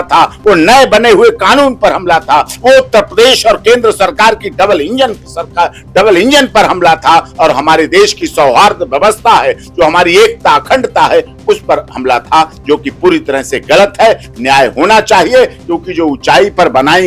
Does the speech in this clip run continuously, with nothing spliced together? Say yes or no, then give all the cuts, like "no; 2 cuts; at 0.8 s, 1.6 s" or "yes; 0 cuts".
yes; 0 cuts